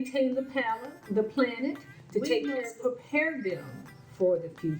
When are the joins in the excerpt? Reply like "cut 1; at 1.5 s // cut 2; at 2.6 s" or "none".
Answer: cut 1; at 2.5 s

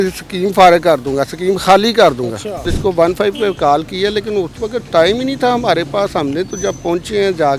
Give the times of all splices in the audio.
cut 1; at 2.7 s

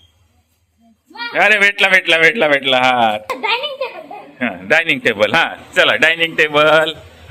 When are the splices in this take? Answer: cut 1; at 3.3 s

